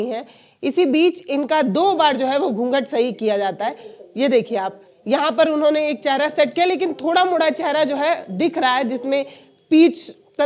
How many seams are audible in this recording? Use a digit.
0